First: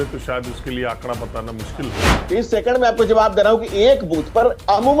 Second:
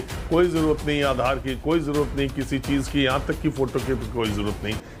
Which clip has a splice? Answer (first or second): first